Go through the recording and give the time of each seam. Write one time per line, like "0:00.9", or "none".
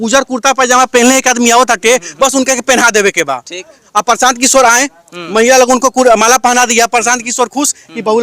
none